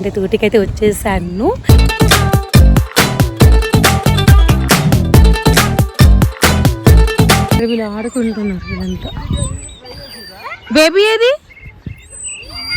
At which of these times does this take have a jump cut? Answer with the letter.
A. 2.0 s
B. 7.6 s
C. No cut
B